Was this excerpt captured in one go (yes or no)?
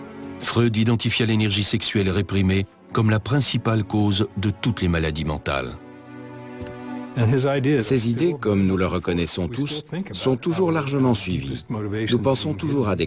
no